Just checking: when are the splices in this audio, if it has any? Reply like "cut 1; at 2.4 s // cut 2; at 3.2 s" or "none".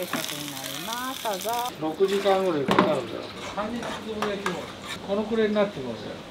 cut 1; at 1.7 s // cut 2; at 3.3 s // cut 3; at 5.0 s